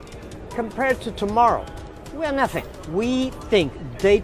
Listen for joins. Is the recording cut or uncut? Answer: cut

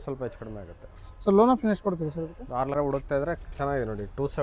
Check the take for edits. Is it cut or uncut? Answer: cut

